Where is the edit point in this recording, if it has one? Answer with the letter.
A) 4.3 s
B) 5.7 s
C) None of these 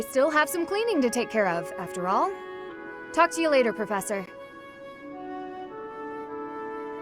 A